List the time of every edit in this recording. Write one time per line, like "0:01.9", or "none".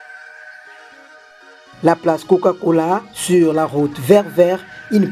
none